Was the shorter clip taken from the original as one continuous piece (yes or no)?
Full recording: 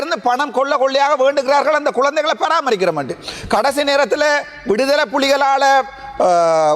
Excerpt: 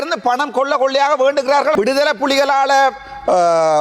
no